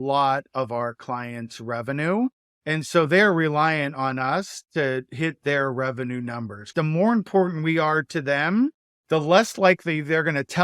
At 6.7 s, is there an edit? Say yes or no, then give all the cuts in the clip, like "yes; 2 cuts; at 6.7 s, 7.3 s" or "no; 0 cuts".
yes; 3 cuts; at 2.5 s, 6.7 s, 8.9 s